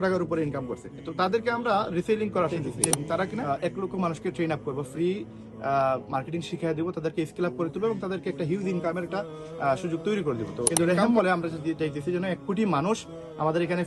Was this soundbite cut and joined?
yes; 2 cuts; at 3.4 s, 10.7 s

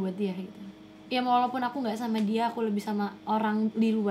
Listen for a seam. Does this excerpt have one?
yes; 1 cut; at 1.0 s

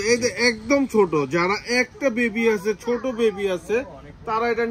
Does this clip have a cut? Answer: no; 0 cuts

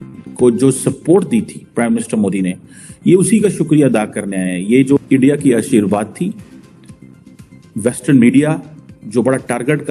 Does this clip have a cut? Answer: yes; 1 cut; at 5.0 s

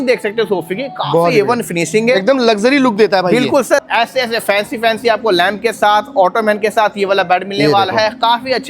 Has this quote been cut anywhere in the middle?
yes; 1 cut; at 3.8 s

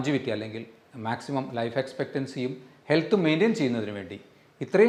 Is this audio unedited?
yes; 0 cuts

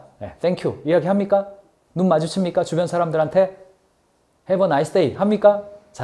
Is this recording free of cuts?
yes; 0 cuts

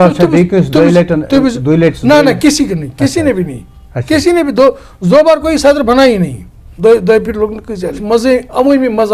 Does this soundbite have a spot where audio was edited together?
yes; 1 cut; at 8.0 s

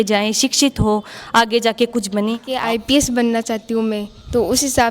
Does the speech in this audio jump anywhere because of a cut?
yes; 1 cut; at 2.5 s

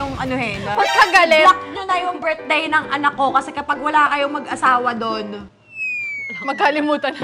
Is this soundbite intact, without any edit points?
yes; 0 cuts

